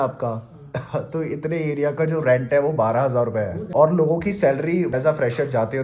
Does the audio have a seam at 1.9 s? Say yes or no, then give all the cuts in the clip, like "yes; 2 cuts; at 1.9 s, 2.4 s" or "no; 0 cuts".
no; 2 cuts; at 3.7 s, 4.9 s